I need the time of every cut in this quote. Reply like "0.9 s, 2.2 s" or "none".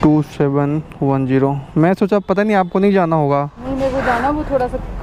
none